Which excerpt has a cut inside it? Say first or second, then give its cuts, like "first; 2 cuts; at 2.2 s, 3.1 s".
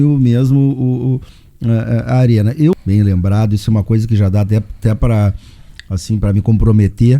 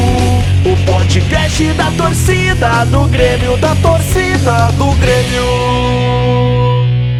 first; 1 cut; at 2.7 s